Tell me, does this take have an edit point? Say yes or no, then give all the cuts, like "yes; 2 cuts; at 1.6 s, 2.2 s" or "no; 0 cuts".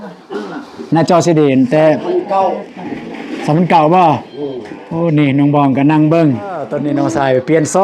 yes; 1 cut; at 6.7 s